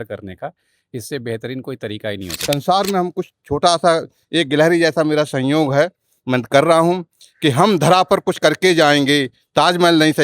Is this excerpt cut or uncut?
cut